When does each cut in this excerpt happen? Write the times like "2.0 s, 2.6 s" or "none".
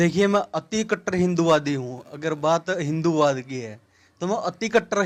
none